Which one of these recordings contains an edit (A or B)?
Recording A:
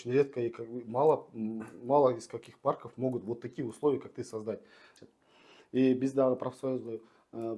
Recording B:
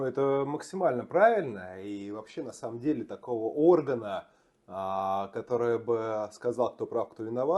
A